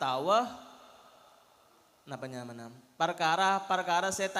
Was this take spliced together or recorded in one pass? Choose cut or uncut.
uncut